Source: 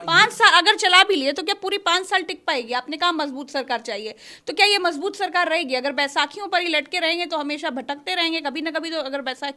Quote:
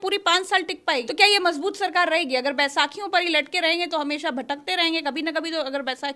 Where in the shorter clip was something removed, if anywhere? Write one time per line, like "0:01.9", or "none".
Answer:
0:01.1

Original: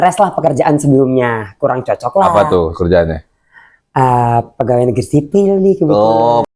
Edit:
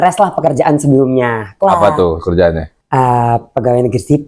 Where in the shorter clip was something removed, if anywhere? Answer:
0:01.5
0:02.7

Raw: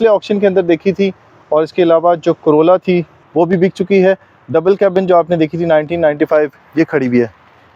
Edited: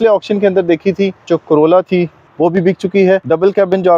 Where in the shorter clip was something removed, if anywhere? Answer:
0:01.2
0:03.2

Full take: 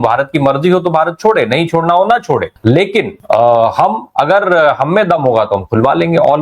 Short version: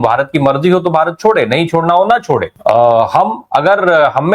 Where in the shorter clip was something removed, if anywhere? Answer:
0:02.5

